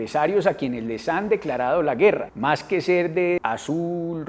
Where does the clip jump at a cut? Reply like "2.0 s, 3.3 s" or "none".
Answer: 2.3 s, 3.4 s